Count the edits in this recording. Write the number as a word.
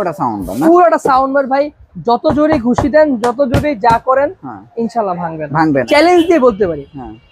one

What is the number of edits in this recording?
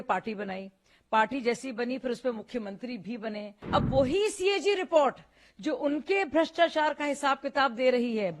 one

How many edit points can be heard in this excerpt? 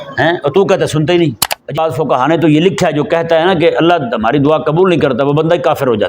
one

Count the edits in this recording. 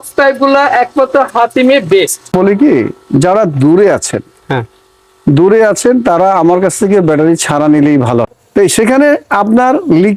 two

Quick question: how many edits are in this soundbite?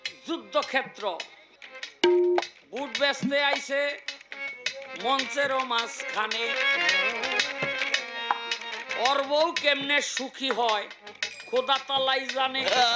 one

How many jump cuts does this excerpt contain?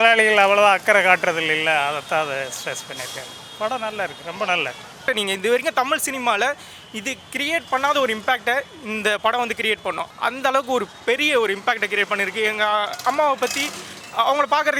two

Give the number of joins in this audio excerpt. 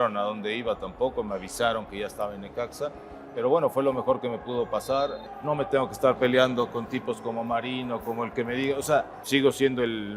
two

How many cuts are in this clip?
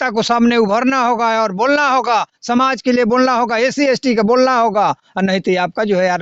zero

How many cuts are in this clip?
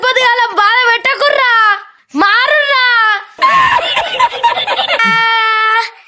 two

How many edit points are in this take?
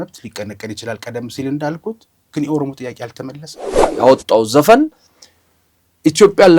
one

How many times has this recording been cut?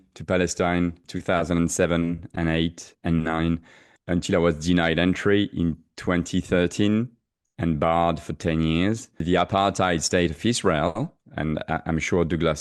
three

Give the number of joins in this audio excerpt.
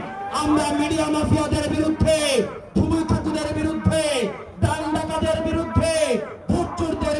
zero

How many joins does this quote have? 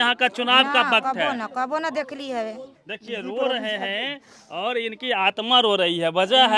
one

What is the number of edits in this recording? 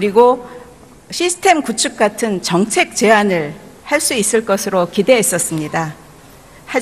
one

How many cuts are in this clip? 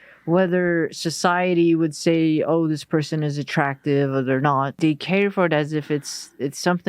one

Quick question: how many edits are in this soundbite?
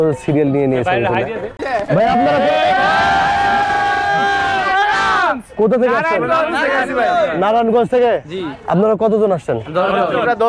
one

